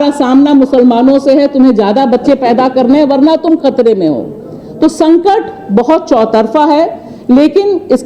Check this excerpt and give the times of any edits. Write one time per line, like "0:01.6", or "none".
none